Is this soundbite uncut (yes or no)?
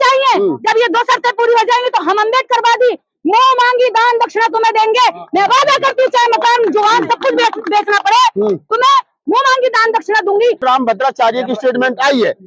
no